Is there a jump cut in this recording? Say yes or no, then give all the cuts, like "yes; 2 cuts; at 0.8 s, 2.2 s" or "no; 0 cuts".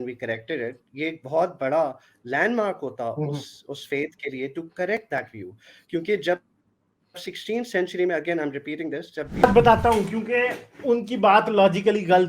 yes; 1 cut; at 9.4 s